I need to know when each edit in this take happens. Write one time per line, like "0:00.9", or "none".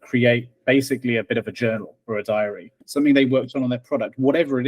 0:02.7